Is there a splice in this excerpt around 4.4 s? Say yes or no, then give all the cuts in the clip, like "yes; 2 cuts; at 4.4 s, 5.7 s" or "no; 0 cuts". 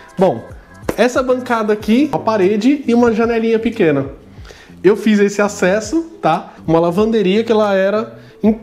no; 2 cuts; at 2.1 s, 6.5 s